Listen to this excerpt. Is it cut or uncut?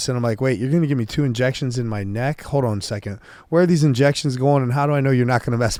uncut